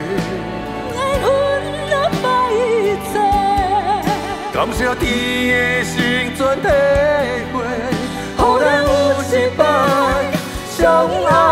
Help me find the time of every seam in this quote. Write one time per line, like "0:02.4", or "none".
none